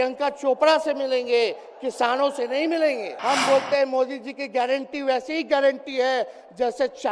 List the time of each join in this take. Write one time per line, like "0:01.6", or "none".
0:03.1